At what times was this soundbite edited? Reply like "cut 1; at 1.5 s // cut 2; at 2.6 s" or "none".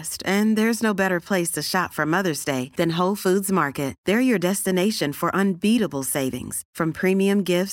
none